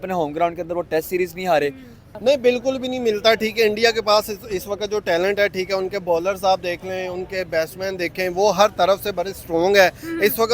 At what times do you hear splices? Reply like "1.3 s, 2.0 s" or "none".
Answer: 2.0 s